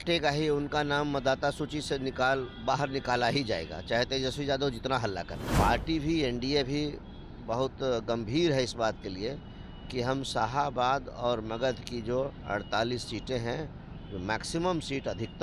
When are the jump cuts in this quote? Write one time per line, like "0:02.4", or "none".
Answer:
0:05.4

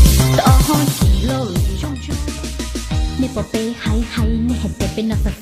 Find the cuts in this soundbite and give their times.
0:01.8

